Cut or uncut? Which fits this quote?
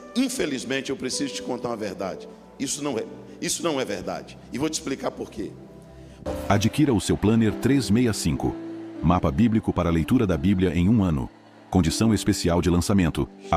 cut